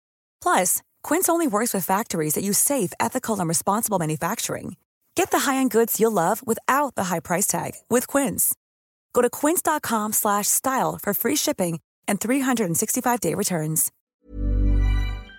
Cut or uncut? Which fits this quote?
cut